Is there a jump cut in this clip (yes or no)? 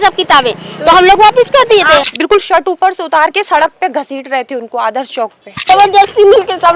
yes